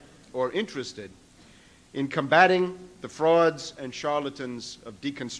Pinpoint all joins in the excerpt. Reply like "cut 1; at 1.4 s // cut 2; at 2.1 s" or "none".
cut 1; at 3.9 s

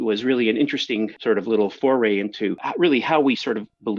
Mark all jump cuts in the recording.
cut 1; at 1.2 s // cut 2; at 2.6 s

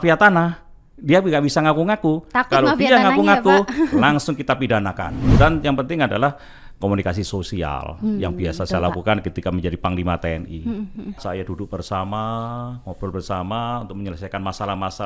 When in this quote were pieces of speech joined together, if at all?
cut 1; at 5.1 s // cut 2; at 11.2 s

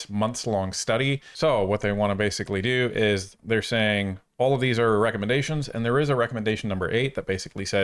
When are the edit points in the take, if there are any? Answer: cut 1; at 1.3 s

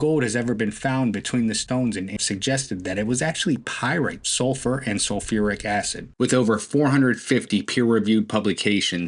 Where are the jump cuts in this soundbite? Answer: cut 1; at 2.2 s // cut 2; at 4.2 s // cut 3; at 6.0 s

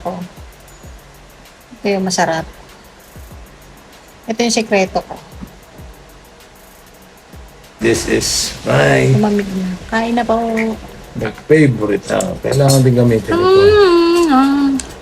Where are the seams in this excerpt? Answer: cut 1; at 7.8 s

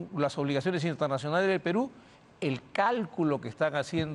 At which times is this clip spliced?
none

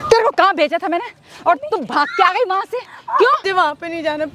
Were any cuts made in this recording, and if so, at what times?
cut 1; at 3.4 s

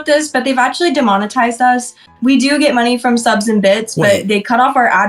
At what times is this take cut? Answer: none

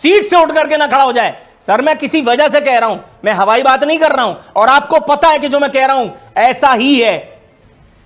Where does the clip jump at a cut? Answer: none

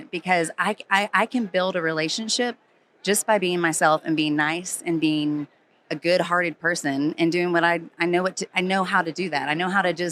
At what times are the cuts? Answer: none

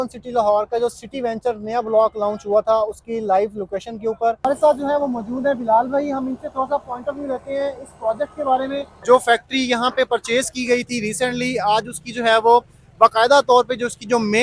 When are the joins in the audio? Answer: cut 1; at 4.6 s // cut 2; at 8.9 s

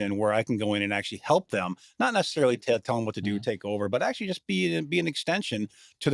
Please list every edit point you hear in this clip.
none

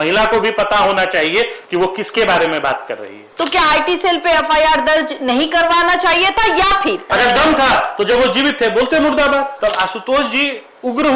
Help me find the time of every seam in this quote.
cut 1; at 3.3 s // cut 2; at 7.0 s // cut 3; at 9.5 s

